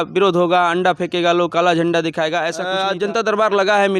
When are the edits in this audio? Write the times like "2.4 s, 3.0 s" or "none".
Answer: 2.7 s